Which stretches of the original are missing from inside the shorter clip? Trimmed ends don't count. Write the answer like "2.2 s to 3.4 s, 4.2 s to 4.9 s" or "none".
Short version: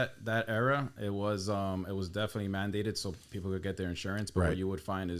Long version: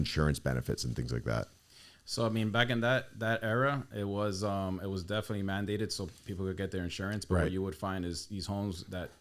none